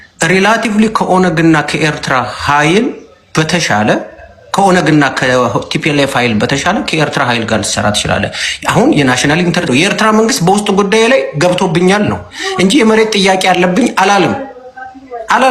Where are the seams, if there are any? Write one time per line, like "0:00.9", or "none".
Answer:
0:09.7